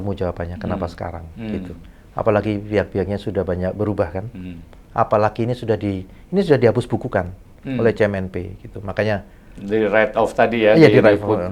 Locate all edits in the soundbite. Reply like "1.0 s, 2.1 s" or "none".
none